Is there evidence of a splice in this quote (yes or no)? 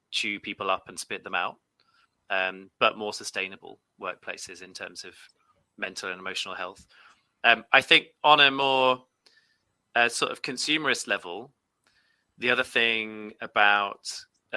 no